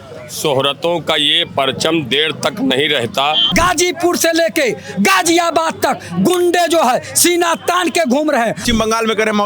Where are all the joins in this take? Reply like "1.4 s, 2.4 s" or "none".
3.4 s, 8.6 s